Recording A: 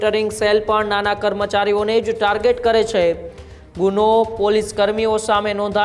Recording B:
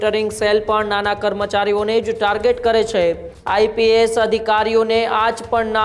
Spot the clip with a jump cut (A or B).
B